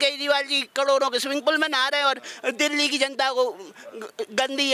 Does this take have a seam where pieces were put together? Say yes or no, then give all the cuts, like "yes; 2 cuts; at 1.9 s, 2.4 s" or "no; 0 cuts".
no; 0 cuts